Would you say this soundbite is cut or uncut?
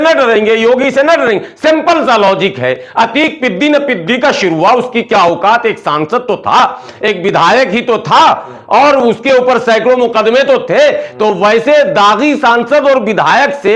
uncut